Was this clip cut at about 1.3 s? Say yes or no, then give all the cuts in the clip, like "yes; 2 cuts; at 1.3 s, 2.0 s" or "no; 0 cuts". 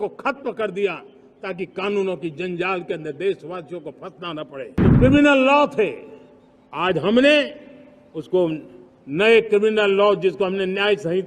no; 1 cut; at 4.7 s